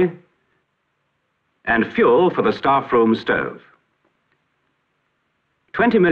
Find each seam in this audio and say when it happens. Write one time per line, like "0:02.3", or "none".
none

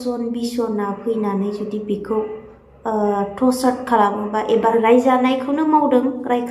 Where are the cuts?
0:04.7

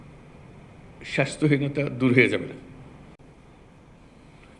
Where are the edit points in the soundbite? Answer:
0:03.2

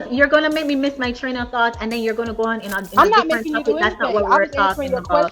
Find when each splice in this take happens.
0:02.8

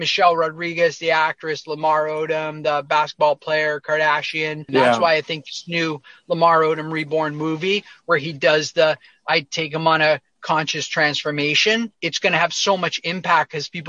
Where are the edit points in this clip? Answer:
0:04.7
0:12.0

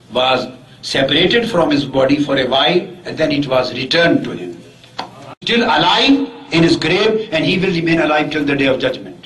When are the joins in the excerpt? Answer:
0:05.4

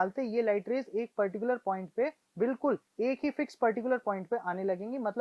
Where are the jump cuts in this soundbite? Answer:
none

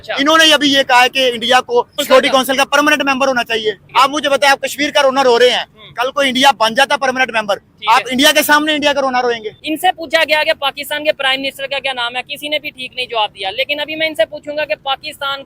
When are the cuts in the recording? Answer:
0:02.0
0:03.8
0:09.5

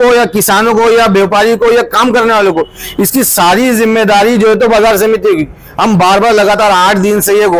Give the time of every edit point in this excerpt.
none

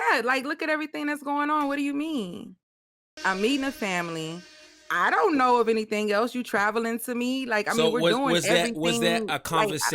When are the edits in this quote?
0:03.0

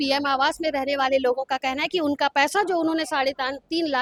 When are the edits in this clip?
none

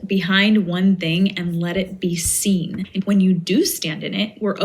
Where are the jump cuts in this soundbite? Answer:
0:02.9

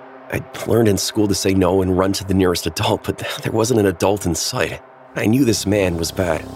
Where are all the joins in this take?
none

